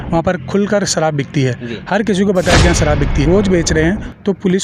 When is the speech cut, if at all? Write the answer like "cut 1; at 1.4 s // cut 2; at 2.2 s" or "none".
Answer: cut 1; at 3.2 s